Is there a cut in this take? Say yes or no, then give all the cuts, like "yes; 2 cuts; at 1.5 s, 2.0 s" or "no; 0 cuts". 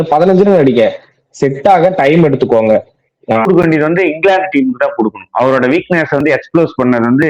yes; 1 cut; at 3.5 s